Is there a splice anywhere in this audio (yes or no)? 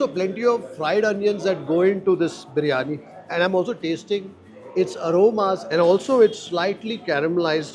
no